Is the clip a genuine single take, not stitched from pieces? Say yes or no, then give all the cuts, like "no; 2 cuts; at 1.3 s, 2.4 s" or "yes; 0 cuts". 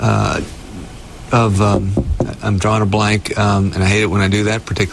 no; 1 cut; at 2.1 s